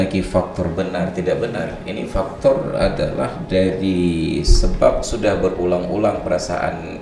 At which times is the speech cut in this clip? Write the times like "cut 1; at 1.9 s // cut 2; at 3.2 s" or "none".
none